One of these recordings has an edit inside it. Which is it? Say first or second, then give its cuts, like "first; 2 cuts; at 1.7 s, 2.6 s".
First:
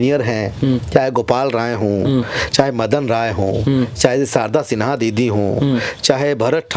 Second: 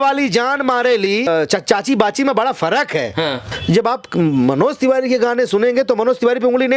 second; 2 cuts; at 1.3 s, 3.5 s